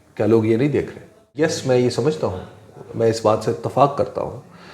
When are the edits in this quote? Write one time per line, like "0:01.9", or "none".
0:01.3